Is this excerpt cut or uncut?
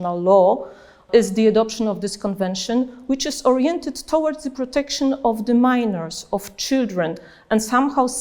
cut